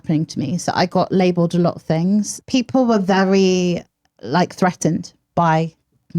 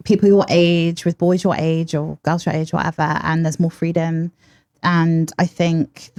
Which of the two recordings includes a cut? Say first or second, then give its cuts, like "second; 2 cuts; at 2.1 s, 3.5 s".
first; 1 cut; at 2.4 s